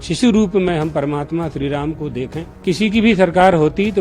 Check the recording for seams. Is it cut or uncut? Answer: cut